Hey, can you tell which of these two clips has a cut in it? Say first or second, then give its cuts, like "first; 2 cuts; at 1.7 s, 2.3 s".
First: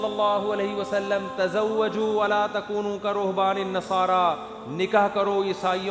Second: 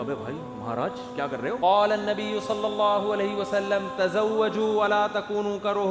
second; 1 cut; at 1.6 s